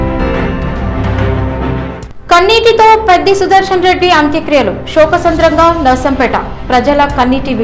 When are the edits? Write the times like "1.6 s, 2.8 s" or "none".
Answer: 1.9 s